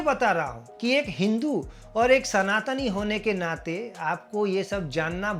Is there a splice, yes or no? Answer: no